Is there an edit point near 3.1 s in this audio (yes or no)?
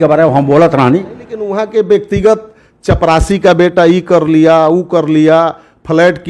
no